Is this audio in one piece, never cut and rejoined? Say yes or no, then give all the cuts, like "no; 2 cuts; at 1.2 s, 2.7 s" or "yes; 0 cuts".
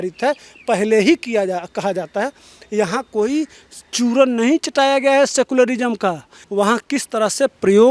no; 1 cut; at 6.3 s